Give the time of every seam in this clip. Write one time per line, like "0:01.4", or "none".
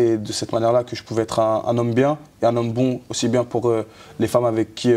none